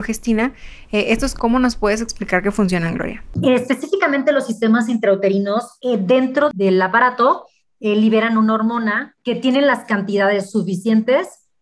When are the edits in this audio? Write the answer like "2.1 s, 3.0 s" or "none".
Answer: 1.3 s, 3.3 s, 5.7 s, 6.5 s, 9.1 s